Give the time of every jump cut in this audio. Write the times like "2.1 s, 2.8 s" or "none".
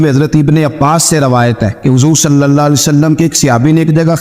1.8 s

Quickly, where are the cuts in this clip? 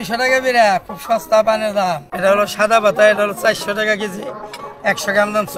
2.1 s

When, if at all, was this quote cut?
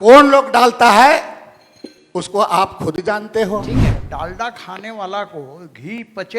4.0 s

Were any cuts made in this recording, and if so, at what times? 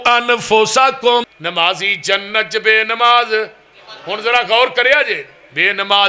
1.3 s

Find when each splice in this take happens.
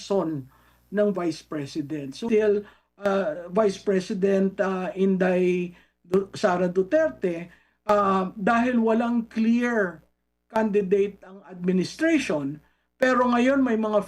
2.2 s

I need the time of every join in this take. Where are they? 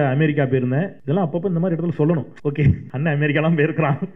1.0 s, 2.7 s

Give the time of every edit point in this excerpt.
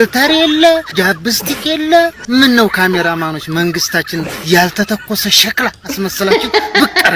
none

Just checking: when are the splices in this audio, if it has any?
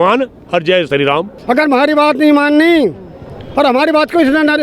1.3 s

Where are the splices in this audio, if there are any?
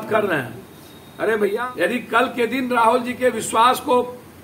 1.6 s

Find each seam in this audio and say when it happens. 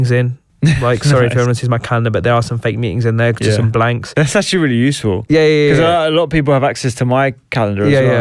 4.2 s

